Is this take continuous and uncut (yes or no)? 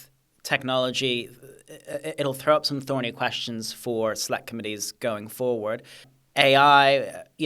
no